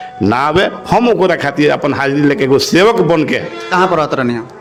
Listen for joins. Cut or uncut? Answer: uncut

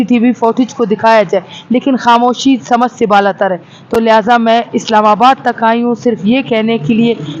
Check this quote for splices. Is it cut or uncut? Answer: uncut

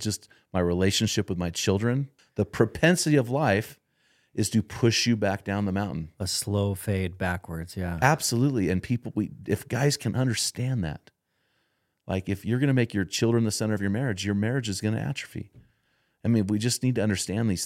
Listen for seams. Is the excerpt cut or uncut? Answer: cut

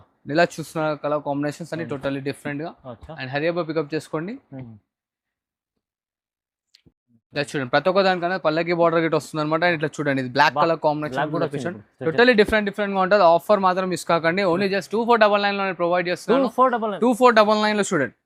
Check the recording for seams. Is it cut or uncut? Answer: uncut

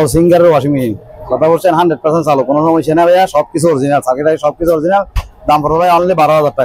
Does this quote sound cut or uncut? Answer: uncut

